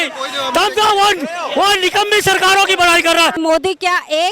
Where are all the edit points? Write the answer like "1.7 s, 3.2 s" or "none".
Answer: 3.4 s